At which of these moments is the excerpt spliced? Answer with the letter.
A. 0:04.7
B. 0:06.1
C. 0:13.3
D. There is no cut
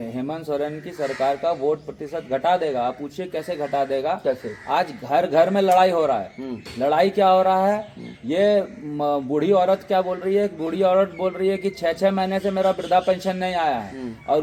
D